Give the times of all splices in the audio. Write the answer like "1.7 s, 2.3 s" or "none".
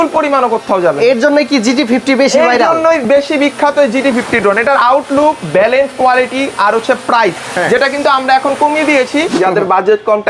9.3 s